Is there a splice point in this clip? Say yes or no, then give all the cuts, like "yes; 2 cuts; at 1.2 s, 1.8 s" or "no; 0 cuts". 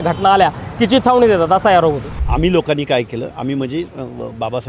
yes; 1 cut; at 2.1 s